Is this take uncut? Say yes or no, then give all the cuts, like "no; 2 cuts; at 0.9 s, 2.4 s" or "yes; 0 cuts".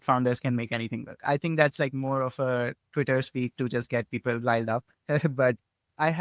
yes; 0 cuts